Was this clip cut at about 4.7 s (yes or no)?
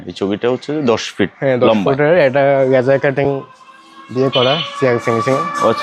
no